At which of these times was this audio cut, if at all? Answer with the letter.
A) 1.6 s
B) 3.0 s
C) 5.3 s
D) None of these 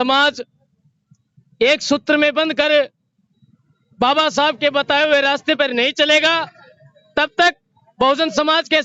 D